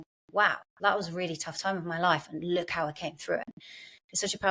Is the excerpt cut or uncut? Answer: cut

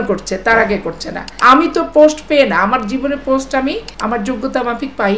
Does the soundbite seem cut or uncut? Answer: cut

